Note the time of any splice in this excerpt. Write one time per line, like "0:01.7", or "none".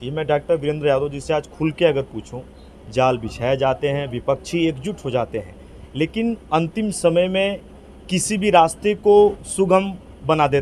none